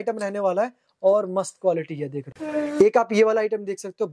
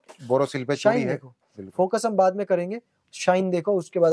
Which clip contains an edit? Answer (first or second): first